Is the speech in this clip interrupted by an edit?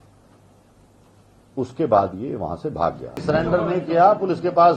yes; 1 cut; at 3.2 s

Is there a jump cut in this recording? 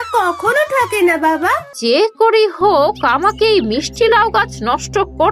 yes; 1 cut; at 1.7 s

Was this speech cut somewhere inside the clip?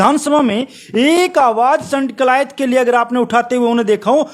no; 0 cuts

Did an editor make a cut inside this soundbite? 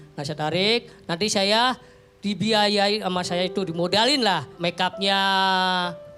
yes; 1 cut; at 4.5 s

